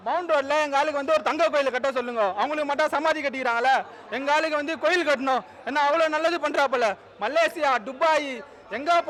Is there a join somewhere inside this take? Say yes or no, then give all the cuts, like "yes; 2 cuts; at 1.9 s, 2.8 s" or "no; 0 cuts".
no; 0 cuts